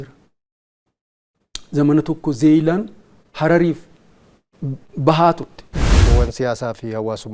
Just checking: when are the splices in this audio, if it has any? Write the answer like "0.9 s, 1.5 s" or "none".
6.0 s